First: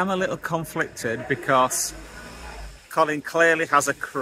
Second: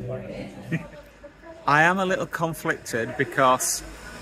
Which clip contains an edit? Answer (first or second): second